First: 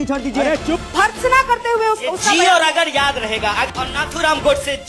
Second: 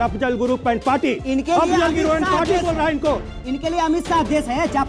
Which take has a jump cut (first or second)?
first